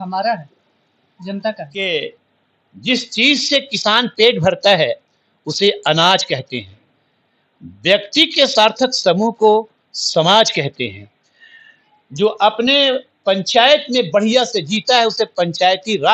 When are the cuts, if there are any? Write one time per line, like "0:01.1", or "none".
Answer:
0:01.7